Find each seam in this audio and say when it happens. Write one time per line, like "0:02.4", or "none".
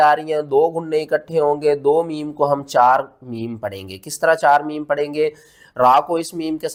none